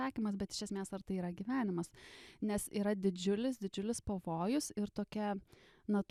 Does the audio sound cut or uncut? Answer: uncut